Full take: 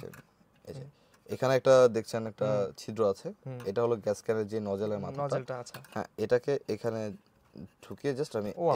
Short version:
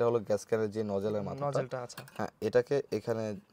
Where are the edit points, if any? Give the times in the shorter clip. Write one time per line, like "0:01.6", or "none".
none